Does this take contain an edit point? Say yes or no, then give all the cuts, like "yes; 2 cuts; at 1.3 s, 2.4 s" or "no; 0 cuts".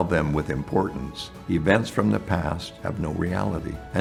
no; 0 cuts